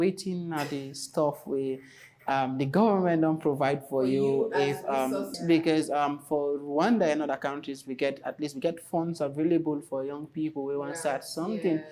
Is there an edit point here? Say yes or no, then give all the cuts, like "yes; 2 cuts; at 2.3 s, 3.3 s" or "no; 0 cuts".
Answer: yes; 1 cut; at 5.4 s